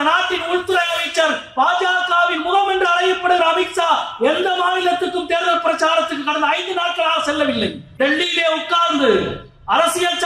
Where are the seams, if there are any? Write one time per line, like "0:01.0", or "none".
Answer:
0:07.8